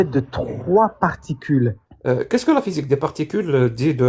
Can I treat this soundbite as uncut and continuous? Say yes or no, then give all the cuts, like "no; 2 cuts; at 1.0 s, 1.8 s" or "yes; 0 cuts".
no; 1 cut; at 1.9 s